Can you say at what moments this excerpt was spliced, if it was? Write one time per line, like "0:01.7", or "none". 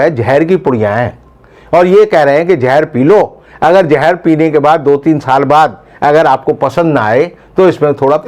none